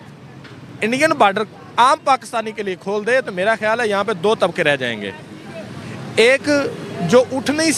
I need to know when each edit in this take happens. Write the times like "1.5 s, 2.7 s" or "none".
none